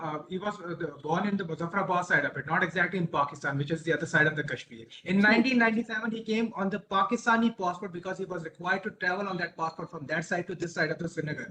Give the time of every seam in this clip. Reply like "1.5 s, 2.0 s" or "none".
none